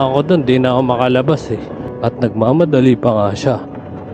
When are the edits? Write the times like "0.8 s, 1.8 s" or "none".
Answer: 1.8 s